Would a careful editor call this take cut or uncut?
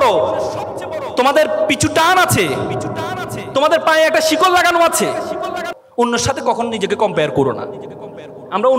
cut